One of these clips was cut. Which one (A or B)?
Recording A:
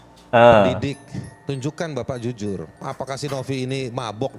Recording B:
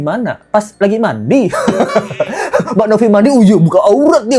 A